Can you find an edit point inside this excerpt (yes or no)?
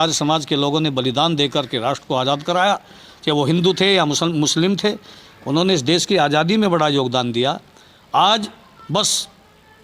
no